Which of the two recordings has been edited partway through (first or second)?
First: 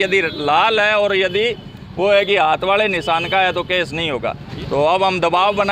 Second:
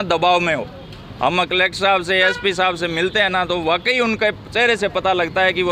first